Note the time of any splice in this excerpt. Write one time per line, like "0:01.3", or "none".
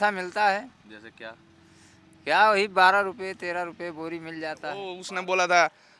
0:05.0